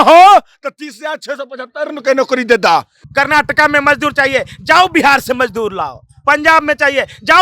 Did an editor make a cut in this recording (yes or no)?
yes